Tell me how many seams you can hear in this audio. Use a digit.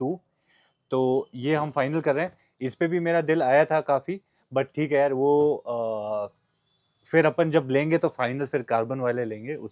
0